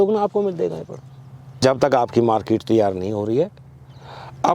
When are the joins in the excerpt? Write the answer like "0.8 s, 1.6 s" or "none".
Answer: 1.4 s